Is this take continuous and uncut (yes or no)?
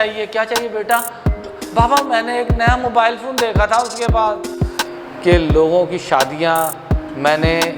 no